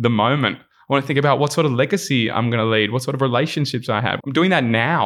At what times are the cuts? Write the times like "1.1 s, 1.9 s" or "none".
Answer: 4.1 s